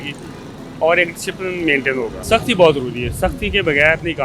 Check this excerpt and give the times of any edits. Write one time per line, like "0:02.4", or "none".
0:02.2

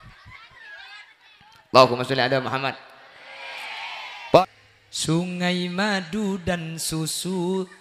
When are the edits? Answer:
0:04.4

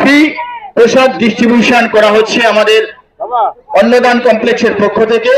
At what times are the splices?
none

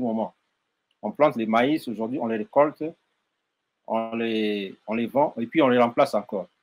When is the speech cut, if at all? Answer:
none

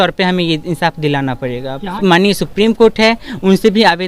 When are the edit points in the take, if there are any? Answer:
0:02.0

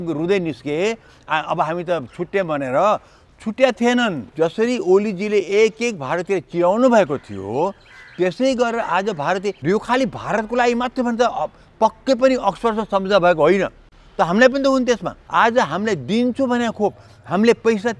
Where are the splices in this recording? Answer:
0:04.2
0:09.6
0:15.2

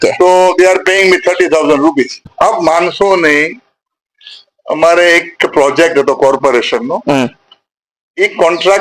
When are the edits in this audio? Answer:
0:02.3

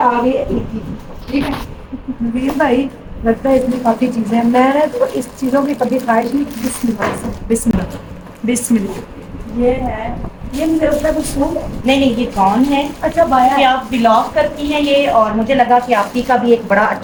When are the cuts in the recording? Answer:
none

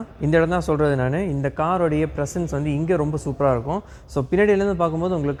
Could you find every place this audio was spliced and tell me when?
none

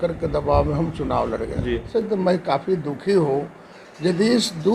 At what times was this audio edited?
0:01.9

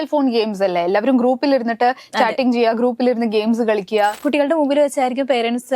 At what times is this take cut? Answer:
0:04.2

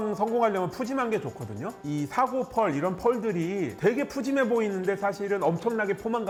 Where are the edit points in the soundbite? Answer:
none

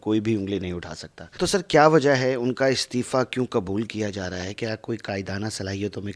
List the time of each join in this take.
none

